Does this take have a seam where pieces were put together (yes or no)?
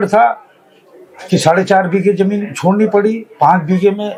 no